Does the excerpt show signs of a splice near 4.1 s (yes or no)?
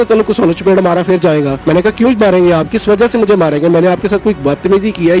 no